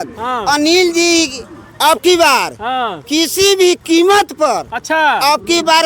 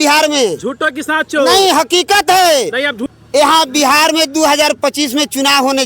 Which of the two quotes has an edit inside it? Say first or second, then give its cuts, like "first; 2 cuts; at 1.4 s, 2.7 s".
second; 1 cut; at 3.0 s